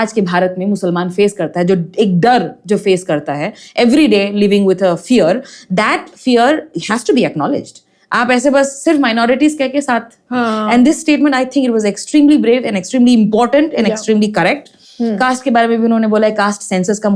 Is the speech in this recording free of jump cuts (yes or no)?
yes